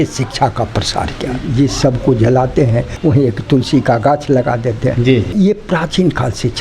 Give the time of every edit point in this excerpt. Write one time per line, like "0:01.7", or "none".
0:01.4
0:02.9
0:05.3